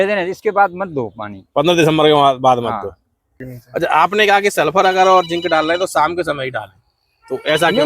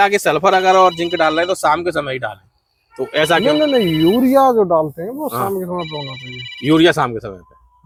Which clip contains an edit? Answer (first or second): first